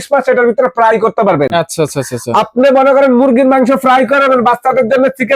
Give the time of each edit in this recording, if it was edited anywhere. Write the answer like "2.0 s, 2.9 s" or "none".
none